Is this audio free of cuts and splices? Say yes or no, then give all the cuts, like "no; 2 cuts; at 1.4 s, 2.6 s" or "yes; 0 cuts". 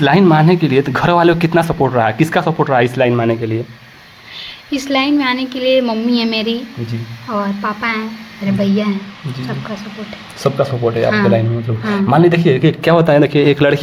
yes; 0 cuts